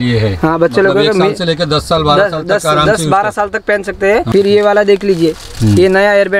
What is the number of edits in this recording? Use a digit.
1